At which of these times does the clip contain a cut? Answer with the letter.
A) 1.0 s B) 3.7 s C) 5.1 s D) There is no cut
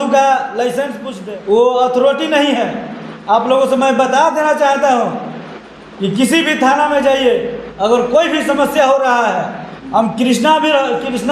A